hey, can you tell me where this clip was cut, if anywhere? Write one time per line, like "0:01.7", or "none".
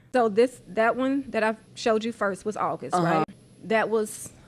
0:01.7
0:03.3